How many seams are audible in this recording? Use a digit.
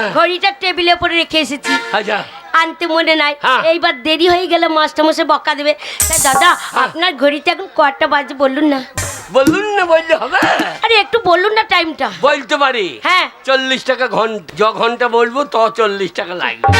2